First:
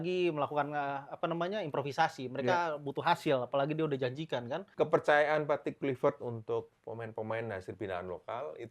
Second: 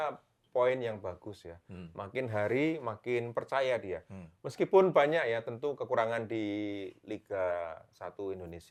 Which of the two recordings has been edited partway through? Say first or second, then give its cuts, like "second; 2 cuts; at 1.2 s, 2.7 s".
first; 1 cut; at 4.7 s